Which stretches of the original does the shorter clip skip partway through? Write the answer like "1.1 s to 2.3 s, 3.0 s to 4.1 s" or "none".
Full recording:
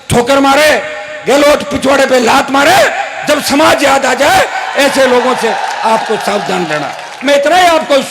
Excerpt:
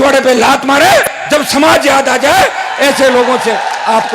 3.0 s to 3.1 s